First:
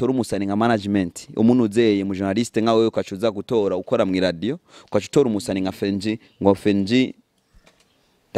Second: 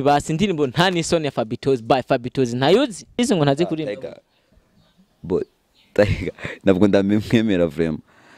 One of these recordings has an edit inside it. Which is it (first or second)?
second